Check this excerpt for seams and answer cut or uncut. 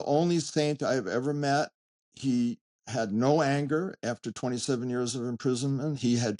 uncut